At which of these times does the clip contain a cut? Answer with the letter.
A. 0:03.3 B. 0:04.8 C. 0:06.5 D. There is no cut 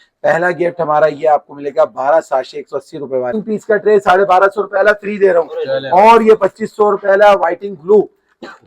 A